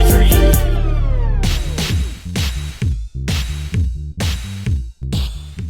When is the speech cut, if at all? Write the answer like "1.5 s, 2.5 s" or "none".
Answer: 1.4 s